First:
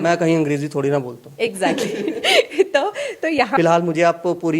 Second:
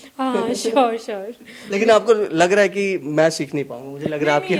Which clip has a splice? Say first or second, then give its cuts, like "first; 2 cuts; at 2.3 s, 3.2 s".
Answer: first; 1 cut; at 3.5 s